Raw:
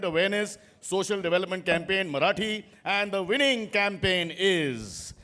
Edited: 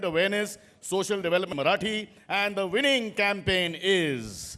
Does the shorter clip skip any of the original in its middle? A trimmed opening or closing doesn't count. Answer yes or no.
yes